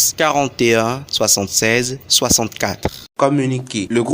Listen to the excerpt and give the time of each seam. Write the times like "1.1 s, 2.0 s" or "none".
3.0 s